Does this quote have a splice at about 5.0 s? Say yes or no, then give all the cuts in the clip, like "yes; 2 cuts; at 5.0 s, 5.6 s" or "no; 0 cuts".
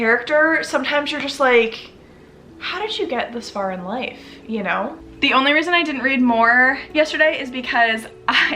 yes; 1 cut; at 5.0 s